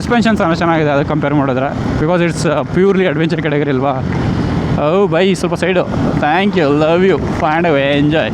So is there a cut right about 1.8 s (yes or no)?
yes